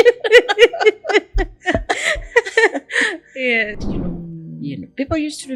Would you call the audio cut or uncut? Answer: cut